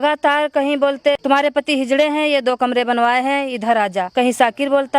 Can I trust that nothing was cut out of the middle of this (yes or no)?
no